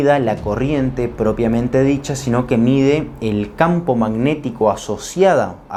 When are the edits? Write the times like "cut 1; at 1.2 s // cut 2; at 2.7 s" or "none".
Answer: none

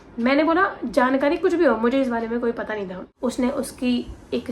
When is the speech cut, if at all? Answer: cut 1; at 3.0 s

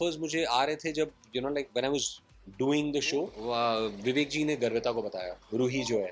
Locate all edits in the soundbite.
cut 1; at 3.4 s

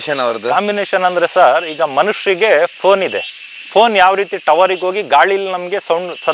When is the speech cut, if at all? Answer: none

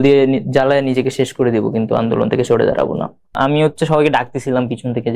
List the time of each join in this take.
cut 1; at 3.4 s

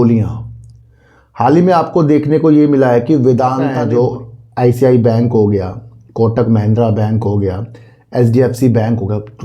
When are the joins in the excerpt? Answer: cut 1; at 3.7 s

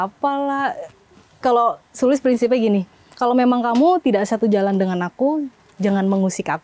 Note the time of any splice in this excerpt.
cut 1; at 1.0 s

